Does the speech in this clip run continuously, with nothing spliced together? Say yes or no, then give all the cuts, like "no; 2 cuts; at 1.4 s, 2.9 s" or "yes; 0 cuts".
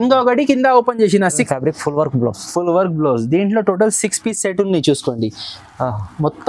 no; 1 cut; at 1.5 s